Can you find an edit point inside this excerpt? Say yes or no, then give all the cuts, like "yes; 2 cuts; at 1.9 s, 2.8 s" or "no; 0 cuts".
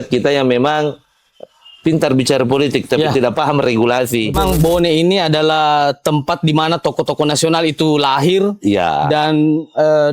yes; 1 cut; at 4.4 s